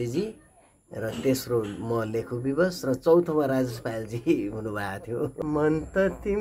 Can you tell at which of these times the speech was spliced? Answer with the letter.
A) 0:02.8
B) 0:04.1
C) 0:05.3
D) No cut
C